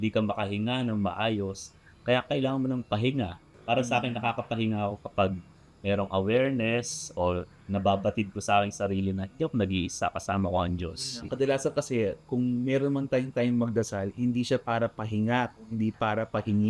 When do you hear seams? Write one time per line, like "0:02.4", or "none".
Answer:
0:03.5
0:11.2